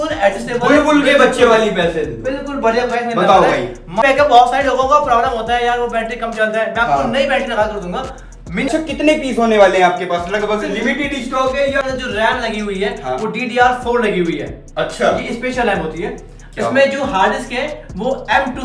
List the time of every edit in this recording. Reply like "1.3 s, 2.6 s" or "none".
4.0 s, 8.7 s, 11.8 s